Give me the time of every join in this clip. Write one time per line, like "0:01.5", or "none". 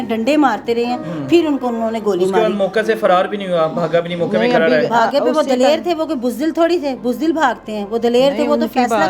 none